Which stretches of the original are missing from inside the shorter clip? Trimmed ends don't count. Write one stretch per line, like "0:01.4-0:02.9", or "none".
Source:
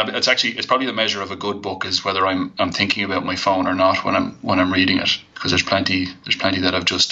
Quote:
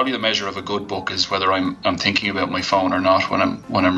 none